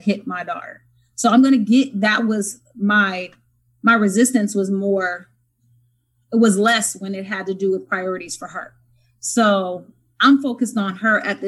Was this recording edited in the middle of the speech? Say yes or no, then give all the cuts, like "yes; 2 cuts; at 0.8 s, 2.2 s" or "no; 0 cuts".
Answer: no; 0 cuts